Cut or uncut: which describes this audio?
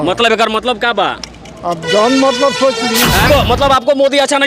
cut